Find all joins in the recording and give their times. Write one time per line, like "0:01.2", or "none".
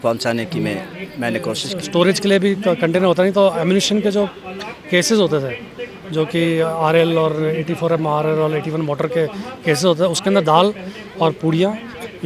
0:01.6